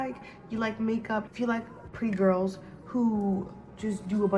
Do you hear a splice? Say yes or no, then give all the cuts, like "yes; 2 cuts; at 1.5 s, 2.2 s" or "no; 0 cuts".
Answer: yes; 1 cut; at 1.8 s